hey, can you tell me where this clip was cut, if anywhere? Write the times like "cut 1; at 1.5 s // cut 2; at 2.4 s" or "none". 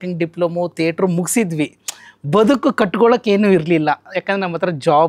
none